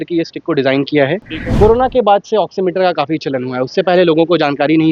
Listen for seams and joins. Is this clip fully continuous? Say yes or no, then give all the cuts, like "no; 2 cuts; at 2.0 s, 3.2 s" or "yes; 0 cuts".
no; 1 cut; at 1.4 s